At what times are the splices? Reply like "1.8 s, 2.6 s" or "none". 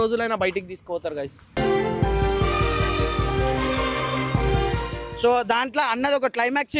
5.0 s